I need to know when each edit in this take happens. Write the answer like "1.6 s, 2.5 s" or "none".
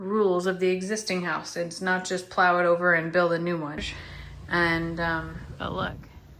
5.4 s

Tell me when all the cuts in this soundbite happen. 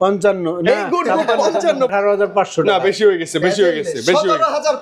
1.9 s

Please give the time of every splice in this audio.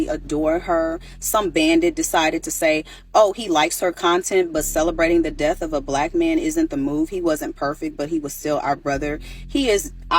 1.1 s, 2.9 s

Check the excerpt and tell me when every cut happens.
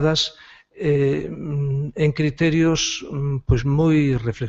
none

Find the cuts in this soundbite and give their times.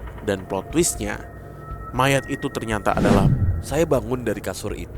3.3 s

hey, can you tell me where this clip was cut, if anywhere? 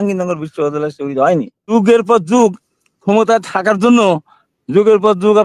1.7 s

